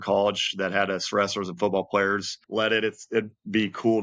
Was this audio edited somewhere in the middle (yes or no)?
yes